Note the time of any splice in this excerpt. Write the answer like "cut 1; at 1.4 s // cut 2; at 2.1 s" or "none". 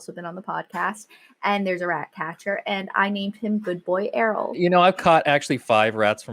cut 1; at 4.5 s